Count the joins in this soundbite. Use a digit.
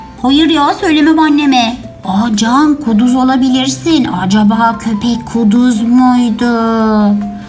0